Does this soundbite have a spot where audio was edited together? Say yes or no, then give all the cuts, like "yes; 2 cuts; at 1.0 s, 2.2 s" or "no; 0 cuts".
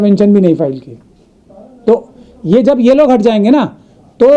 no; 0 cuts